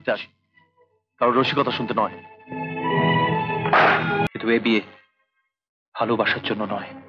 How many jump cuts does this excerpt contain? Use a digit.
1